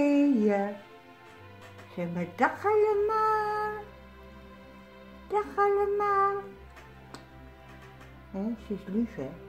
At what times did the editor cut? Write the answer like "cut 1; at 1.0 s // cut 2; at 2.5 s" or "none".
none